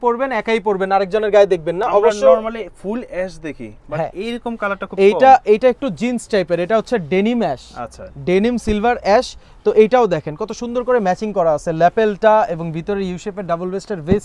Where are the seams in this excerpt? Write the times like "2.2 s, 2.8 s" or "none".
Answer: none